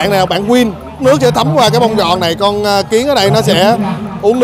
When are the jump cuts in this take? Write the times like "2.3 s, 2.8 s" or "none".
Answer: 1.0 s